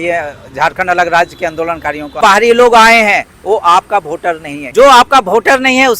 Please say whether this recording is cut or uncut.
cut